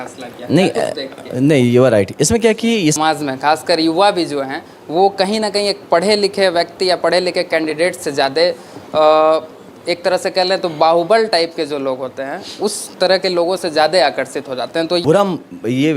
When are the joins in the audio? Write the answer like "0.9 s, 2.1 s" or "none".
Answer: 3.0 s, 15.0 s